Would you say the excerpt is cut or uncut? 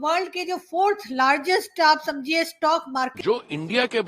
cut